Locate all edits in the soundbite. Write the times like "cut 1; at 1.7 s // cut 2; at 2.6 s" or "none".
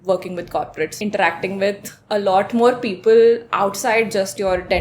cut 1; at 0.9 s